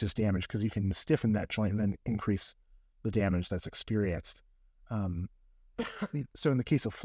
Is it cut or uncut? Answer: uncut